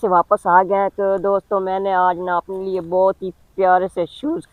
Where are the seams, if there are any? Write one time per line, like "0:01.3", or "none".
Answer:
none